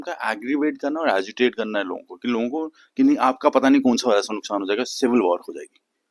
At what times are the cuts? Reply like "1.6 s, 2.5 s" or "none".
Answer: none